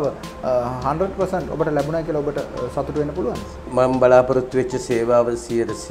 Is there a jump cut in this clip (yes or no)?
yes